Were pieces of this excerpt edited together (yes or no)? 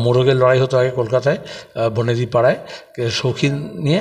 no